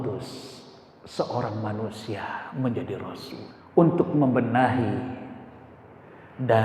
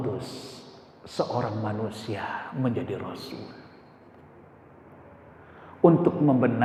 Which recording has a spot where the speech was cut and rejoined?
first; 1 cut; at 3.5 s

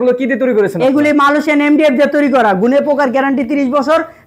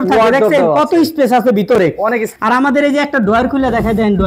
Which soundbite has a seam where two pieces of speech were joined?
second; 1 cut; at 2.3 s

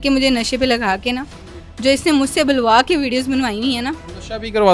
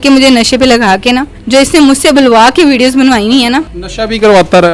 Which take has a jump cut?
second; 1 cut; at 1.3 s

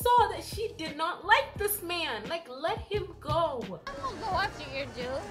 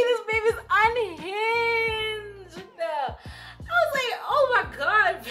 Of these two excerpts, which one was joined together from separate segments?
first; 1 cut; at 3.8 s

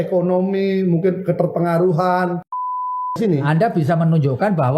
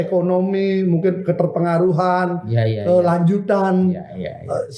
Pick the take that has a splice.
first; 1 cut; at 2.9 s

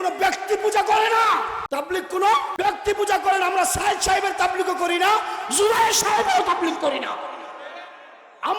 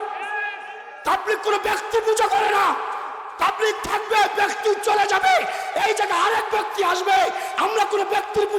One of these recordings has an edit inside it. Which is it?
first; 2 cuts; at 1.6 s, 2.5 s

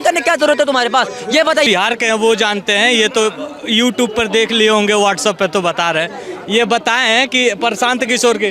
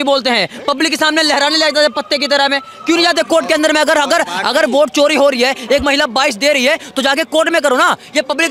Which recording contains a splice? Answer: first; 1 cut; at 1.7 s

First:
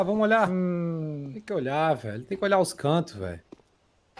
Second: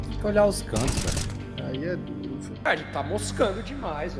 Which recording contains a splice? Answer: second; 1 cut; at 2.7 s

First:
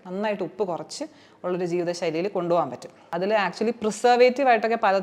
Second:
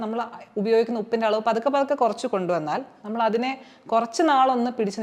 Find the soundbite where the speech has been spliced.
first; 1 cut; at 3.1 s

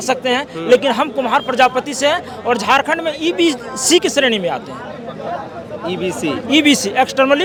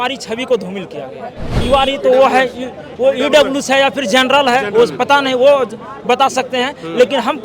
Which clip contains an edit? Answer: second; 1 cut; at 1.5 s

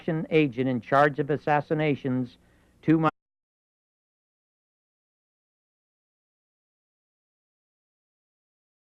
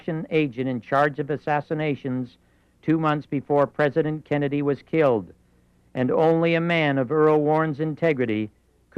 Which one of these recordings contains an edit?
second; 1 cut; at 3.1 s

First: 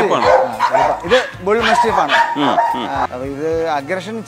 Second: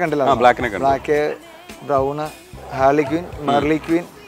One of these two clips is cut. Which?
first; 2 cuts; at 1.0 s, 3.1 s

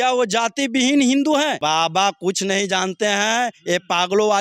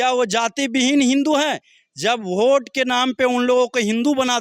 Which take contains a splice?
first; 1 cut; at 1.6 s

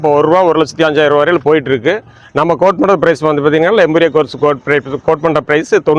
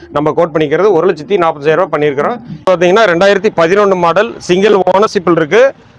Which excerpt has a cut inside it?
second; 1 cut; at 2.7 s

